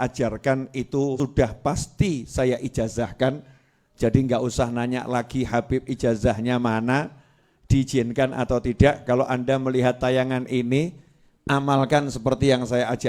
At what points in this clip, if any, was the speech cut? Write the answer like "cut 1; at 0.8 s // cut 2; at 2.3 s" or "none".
cut 1; at 1.1 s